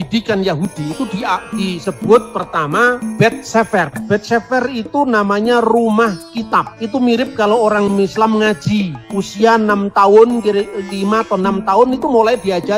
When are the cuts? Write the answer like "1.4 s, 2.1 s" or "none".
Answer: none